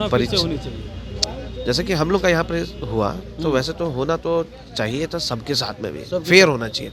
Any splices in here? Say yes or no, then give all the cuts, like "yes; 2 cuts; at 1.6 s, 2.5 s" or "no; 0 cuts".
no; 0 cuts